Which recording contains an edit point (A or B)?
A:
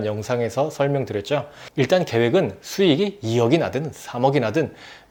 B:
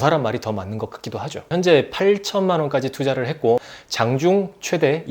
B